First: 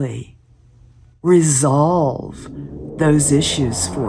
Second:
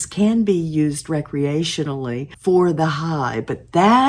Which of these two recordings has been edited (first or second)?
second